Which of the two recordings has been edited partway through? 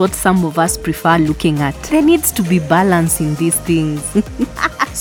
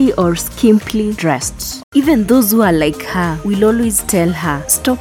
second; 1 cut; at 1.6 s

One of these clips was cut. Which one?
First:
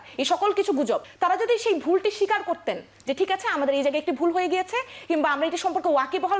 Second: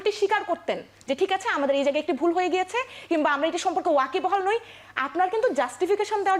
first; 1 cut; at 1.1 s

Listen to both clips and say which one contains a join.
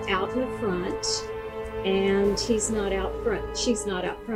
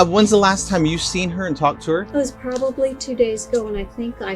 second; 1 cut; at 2.1 s

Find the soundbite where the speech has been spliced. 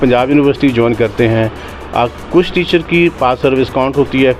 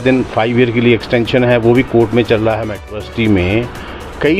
second; 1 cut; at 3.0 s

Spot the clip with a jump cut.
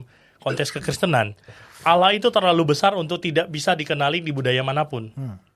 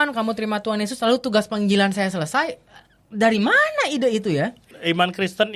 second; 1 cut; at 4.7 s

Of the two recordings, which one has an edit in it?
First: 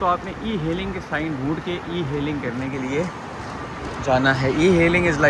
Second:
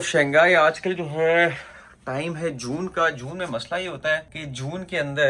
second; 1 cut; at 4.4 s

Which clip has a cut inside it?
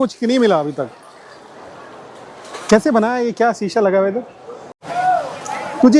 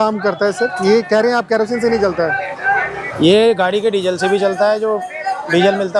first; 1 cut; at 4.9 s

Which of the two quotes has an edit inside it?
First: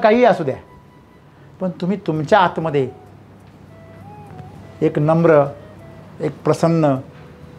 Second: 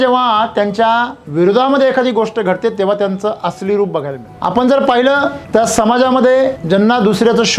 second; 4 cuts; at 1.2 s, 4.2 s, 5.4 s, 6.6 s

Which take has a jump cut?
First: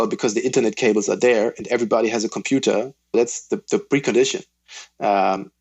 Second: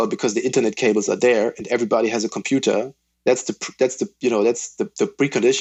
first; 1 cut; at 3.1 s

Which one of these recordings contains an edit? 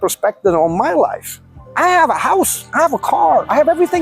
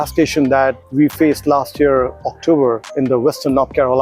second; 2 cuts; at 0.8 s, 2.9 s

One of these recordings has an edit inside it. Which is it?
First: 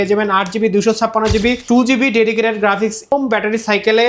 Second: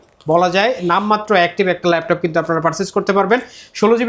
first; 2 cuts; at 1.6 s, 3.1 s

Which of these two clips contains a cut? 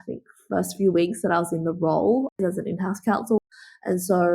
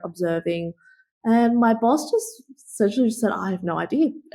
first; 2 cuts; at 2.4 s, 3.4 s

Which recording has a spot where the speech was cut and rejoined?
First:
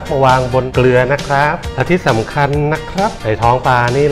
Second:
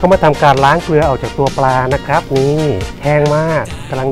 second; 1 cut; at 2.9 s

